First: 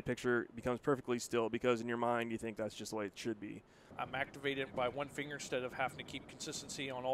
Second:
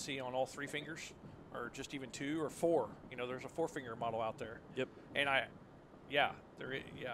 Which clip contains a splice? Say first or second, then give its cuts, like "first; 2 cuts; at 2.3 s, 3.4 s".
first; 1 cut; at 3.9 s